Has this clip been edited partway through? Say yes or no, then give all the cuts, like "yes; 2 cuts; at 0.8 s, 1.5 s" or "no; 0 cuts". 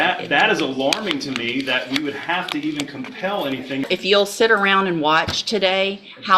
yes; 1 cut; at 3.9 s